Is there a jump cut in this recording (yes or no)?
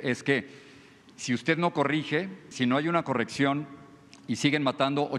yes